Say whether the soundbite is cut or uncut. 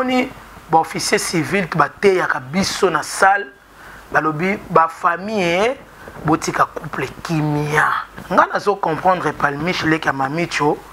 cut